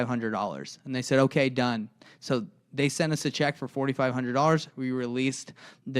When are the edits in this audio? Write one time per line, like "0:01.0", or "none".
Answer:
none

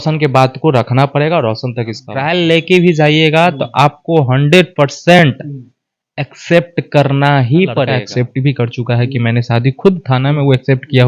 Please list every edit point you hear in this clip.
0:02.1
0:08.0

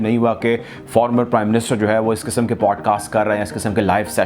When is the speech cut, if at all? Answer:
none

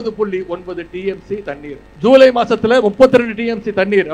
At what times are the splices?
0:01.8

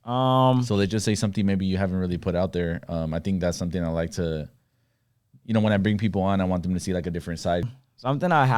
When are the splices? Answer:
0:07.7

